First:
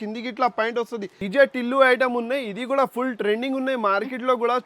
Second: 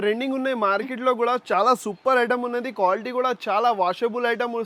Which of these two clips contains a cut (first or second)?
first